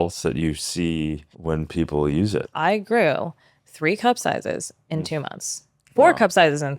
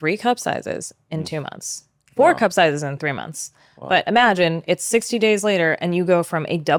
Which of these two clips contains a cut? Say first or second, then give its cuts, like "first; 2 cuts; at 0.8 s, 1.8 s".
first; 2 cuts; at 1.3 s, 2.5 s